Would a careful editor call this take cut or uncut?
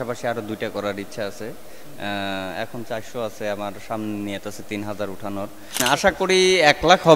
cut